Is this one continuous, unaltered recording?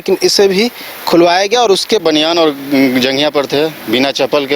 no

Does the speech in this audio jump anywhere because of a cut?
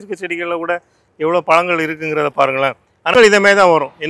yes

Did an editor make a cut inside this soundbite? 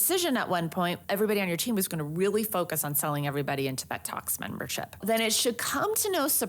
yes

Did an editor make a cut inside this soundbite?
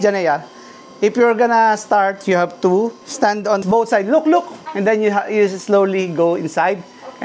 yes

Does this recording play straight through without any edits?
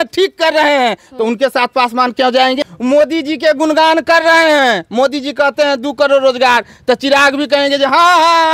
no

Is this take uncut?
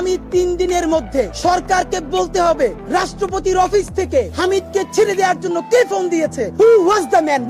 no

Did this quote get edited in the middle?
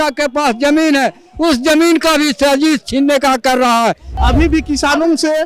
yes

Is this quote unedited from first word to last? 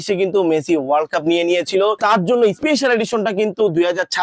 no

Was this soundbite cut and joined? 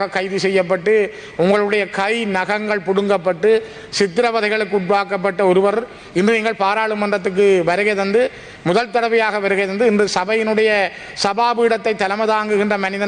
no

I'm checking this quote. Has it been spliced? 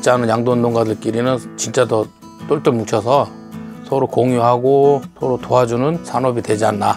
yes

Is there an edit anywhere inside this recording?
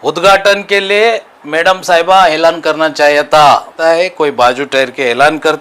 yes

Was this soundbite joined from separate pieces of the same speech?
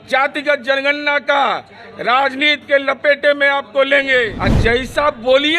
yes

